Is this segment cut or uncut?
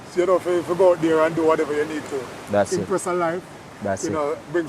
uncut